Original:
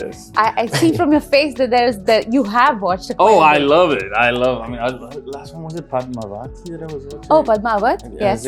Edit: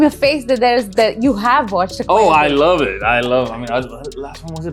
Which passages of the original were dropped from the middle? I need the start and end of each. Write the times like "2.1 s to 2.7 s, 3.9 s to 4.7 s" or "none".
none